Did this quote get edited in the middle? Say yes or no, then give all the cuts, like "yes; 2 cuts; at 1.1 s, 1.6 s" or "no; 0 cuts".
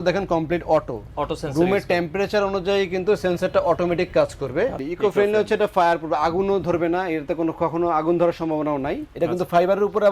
yes; 2 cuts; at 4.9 s, 9.0 s